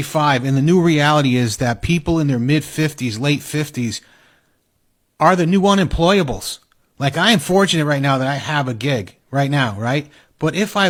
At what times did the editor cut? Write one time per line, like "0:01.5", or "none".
none